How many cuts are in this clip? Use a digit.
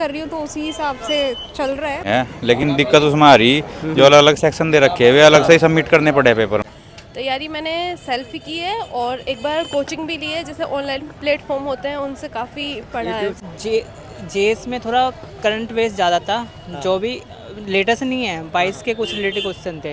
3